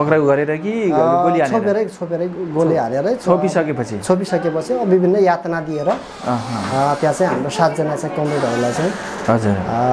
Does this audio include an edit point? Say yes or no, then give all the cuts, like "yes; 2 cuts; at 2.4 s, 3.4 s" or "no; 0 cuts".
no; 0 cuts